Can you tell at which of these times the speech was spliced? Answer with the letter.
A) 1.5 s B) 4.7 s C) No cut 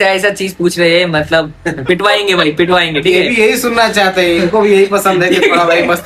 C